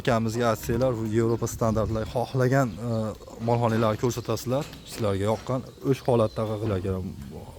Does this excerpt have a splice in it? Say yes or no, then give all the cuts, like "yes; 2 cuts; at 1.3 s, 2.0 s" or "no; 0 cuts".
yes; 1 cut; at 6.7 s